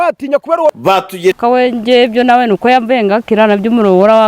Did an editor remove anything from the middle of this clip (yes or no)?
yes